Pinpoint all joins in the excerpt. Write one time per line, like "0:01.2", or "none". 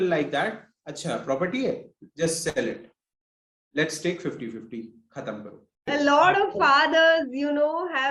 0:05.9